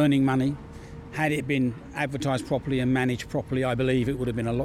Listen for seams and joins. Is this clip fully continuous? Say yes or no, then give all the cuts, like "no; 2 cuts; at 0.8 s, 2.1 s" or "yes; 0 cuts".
yes; 0 cuts